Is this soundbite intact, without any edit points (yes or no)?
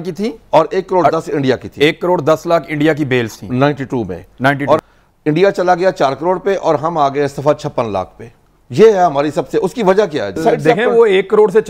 no